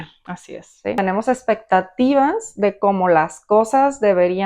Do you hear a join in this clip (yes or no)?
yes